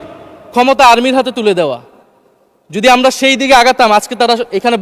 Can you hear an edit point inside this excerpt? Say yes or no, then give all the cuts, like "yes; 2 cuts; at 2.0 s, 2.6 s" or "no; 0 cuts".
no; 0 cuts